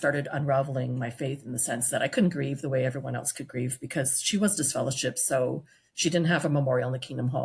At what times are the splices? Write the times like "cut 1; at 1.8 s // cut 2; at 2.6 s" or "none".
none